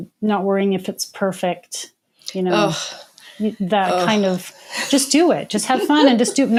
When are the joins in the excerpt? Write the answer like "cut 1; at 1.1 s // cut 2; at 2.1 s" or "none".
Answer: none